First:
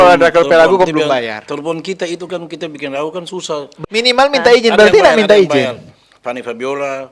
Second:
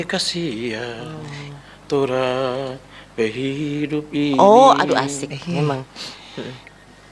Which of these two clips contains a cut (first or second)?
first